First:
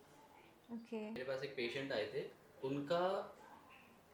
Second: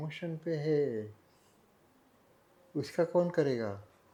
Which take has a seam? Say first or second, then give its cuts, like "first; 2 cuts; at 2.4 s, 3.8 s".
first; 1 cut; at 1.2 s